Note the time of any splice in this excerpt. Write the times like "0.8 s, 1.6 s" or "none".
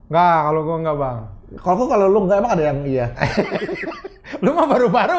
none